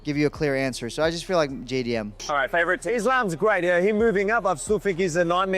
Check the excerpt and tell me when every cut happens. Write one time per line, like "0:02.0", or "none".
0:02.2